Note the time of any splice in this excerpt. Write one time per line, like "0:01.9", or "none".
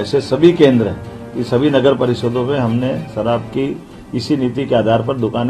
none